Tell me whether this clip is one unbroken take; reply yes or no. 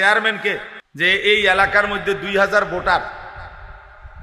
no